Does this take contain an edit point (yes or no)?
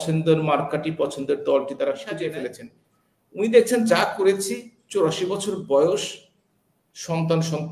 yes